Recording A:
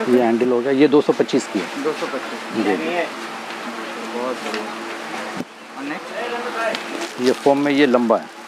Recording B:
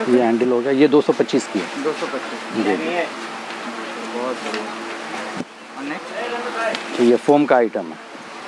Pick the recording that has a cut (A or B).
B